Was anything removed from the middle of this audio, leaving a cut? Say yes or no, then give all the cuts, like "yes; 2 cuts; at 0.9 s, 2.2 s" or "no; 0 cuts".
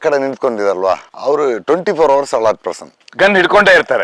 yes; 1 cut; at 1.1 s